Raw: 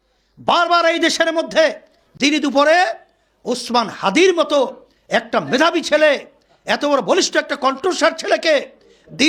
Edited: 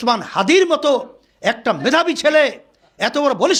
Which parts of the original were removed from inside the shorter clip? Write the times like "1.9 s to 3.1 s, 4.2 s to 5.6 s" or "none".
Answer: none